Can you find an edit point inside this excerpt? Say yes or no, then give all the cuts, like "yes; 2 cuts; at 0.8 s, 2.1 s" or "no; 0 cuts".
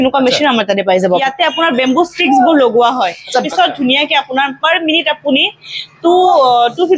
yes; 2 cuts; at 1.2 s, 3.5 s